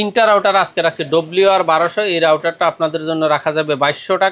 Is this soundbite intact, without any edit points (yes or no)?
yes